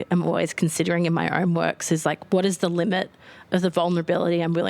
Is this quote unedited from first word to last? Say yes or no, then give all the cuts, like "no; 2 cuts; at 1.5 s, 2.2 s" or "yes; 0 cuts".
yes; 0 cuts